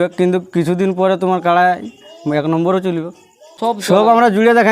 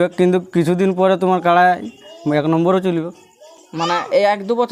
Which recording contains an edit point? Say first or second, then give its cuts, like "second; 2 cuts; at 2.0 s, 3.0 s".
first; 1 cut; at 3.5 s